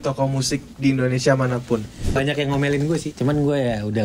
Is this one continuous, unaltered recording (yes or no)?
no